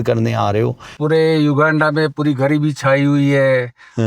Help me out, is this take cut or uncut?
cut